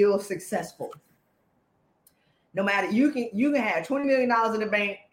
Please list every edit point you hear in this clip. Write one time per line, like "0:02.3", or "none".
none

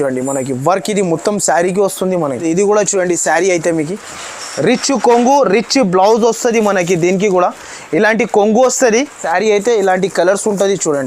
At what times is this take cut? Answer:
0:02.4
0:09.2

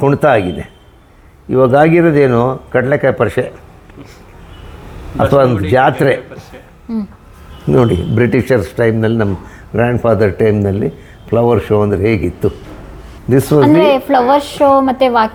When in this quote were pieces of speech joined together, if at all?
none

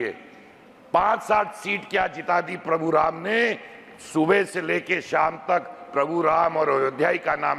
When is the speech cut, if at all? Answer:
none

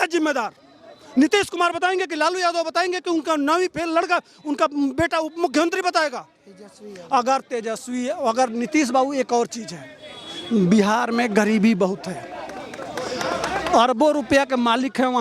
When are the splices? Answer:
none

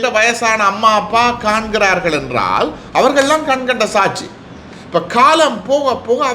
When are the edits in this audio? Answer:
none

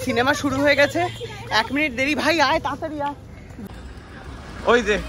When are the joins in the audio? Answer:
0:03.7

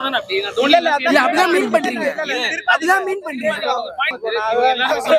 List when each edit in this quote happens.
0:04.1

